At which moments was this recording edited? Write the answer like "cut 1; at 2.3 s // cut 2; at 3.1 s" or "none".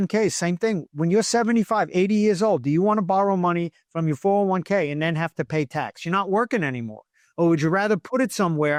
none